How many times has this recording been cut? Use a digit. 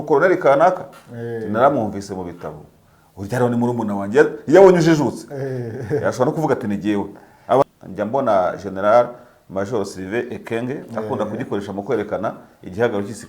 1